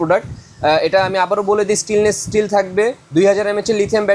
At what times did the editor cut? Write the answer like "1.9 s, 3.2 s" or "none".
none